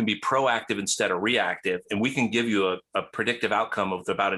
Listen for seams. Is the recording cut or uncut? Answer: uncut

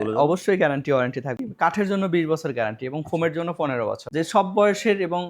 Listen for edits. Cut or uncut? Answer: cut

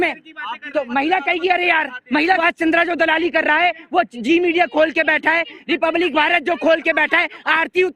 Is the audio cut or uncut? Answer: cut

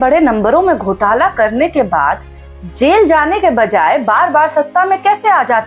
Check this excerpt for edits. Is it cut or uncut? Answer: uncut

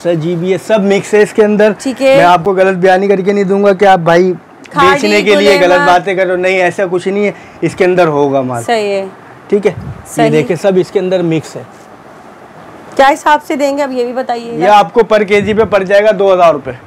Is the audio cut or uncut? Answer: uncut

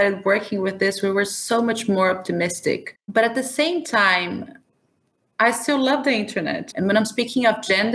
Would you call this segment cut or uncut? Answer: cut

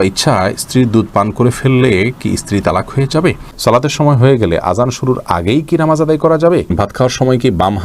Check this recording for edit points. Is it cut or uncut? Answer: cut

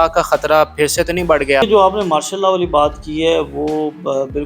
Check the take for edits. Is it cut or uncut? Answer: cut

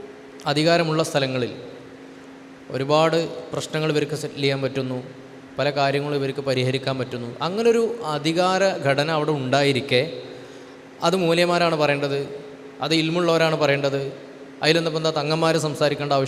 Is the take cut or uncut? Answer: uncut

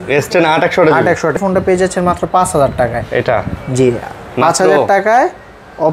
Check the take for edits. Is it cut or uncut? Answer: cut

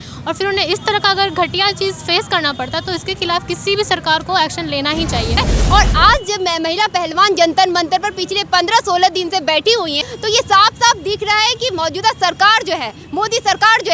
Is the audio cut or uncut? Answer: cut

